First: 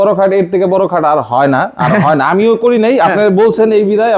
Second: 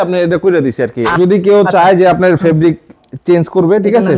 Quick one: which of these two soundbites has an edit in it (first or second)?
second